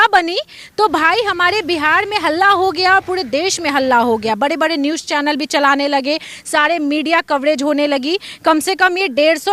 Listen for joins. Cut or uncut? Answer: uncut